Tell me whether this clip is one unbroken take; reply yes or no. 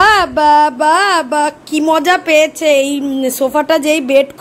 yes